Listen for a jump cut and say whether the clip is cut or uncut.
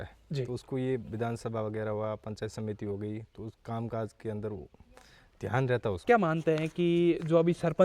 cut